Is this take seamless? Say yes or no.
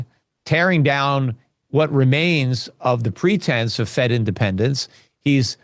yes